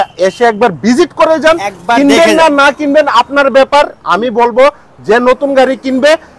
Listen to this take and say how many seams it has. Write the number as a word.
zero